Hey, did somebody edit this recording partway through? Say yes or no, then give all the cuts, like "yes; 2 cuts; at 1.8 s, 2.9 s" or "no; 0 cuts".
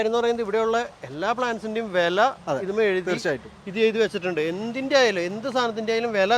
no; 0 cuts